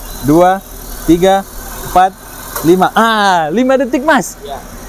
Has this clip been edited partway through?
no; 0 cuts

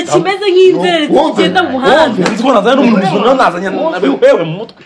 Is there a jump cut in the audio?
no; 0 cuts

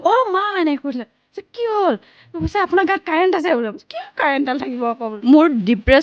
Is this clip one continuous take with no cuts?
no; 1 cut; at 5.1 s

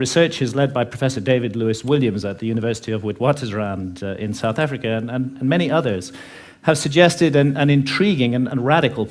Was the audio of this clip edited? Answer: yes; 1 cut; at 3.1 s

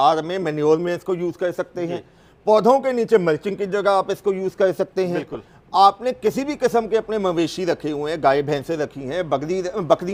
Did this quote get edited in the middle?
no; 0 cuts

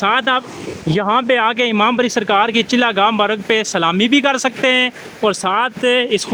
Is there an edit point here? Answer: no; 0 cuts

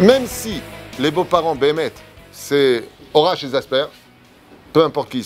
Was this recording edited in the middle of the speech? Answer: no; 0 cuts

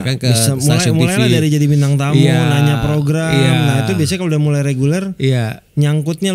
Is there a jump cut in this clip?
no; 0 cuts

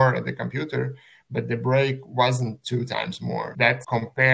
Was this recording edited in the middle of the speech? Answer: no; 0 cuts

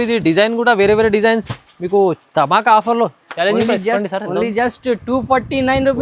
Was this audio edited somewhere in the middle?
yes; 1 cut; at 4.0 s

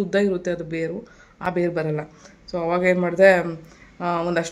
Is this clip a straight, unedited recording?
yes; 0 cuts

